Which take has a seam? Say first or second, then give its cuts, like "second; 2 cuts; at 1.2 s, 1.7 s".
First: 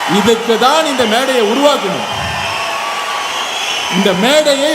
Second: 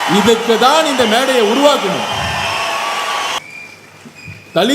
second; 1 cut; at 3.4 s